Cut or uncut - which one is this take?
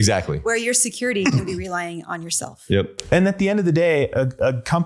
uncut